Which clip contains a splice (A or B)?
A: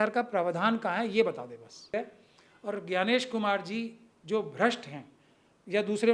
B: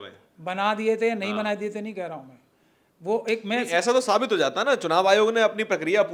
A